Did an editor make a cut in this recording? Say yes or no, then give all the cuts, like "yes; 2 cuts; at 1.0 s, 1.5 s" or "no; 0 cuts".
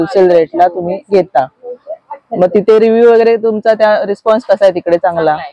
no; 0 cuts